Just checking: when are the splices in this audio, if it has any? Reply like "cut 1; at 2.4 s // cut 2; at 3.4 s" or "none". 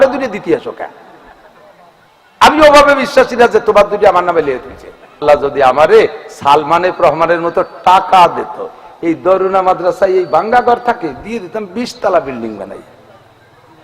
cut 1; at 5.2 s